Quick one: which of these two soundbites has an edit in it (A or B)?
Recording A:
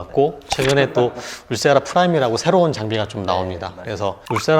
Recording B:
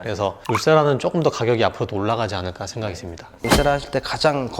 B